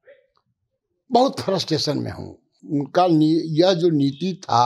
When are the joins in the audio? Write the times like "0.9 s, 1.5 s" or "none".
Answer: none